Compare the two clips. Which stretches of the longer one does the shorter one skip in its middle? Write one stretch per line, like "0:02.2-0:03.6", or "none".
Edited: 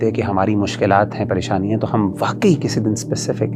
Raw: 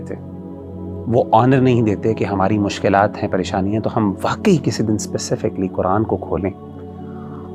none